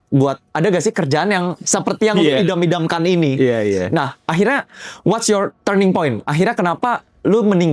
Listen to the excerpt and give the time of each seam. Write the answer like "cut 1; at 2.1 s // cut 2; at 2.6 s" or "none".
none

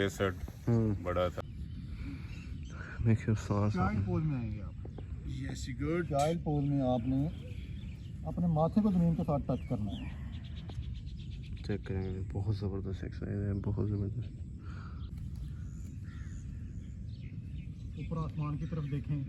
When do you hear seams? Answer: cut 1; at 1.4 s // cut 2; at 15.1 s

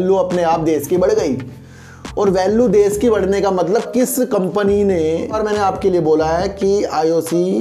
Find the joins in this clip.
cut 1; at 5.4 s

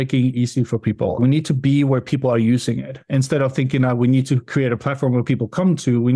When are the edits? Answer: none

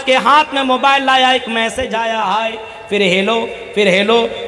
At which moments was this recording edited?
cut 1; at 2.0 s

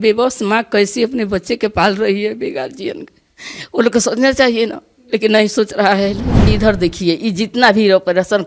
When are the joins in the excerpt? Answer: cut 1; at 6.5 s

